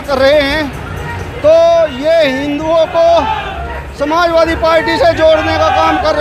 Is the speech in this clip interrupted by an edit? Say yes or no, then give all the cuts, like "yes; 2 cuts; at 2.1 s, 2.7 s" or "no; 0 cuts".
no; 0 cuts